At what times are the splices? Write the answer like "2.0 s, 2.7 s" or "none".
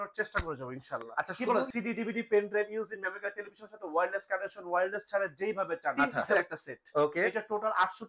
1.3 s, 5.9 s